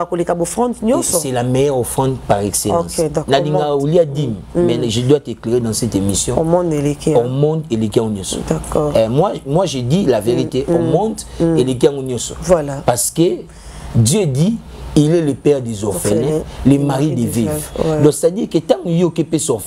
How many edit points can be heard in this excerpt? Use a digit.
0